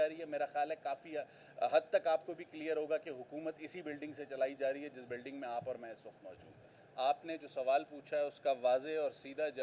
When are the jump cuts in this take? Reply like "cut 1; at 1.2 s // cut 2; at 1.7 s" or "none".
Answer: none